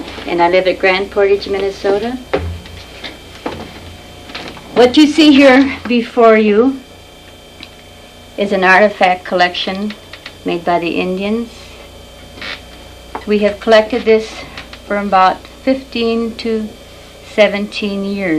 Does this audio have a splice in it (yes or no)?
yes